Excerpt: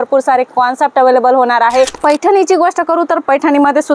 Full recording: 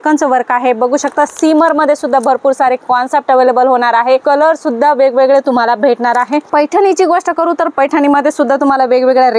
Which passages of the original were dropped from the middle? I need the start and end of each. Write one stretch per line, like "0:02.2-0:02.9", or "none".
0:04.2-0:06.4